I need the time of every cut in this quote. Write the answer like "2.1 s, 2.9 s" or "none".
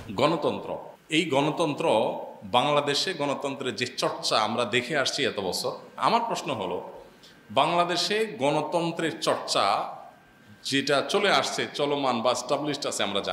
0.9 s, 5.9 s

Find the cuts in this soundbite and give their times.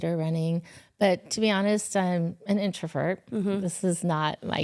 none

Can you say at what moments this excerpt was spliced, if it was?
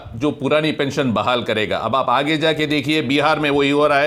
none

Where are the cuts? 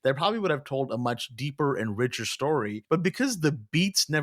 2.8 s

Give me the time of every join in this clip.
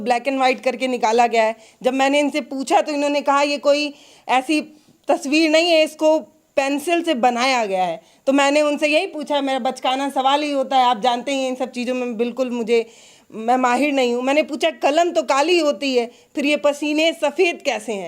none

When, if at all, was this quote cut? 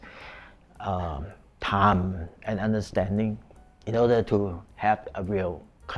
none

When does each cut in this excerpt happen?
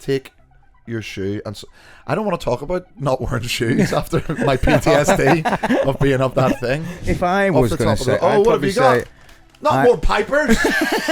7.0 s

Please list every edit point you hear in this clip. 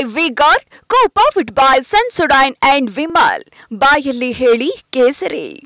none

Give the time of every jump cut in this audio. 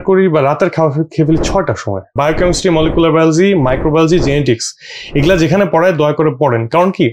2.1 s

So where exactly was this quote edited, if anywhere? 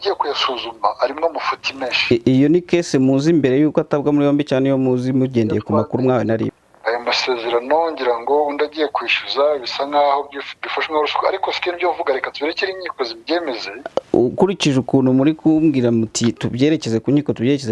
6.5 s, 13.7 s

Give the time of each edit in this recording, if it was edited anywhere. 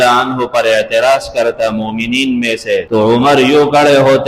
2.9 s

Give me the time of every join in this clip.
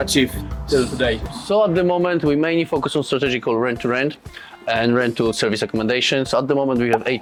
none

